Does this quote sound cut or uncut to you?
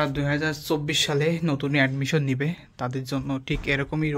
uncut